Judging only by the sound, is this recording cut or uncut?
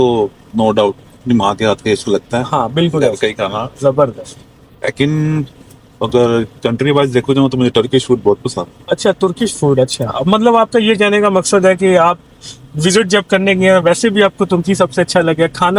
uncut